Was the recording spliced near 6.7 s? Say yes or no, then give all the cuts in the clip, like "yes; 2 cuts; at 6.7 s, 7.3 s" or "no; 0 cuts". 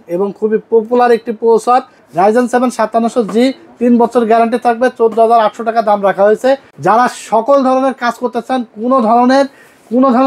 yes; 2 cuts; at 2.0 s, 6.7 s